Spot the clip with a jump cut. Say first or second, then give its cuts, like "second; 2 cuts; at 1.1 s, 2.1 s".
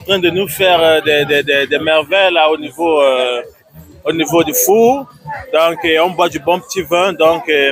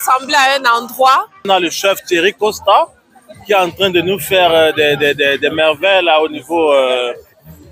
second; 1 cut; at 1.5 s